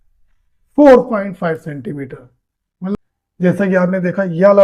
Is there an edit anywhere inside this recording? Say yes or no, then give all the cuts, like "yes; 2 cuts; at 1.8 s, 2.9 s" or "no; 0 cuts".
yes; 1 cut; at 2.9 s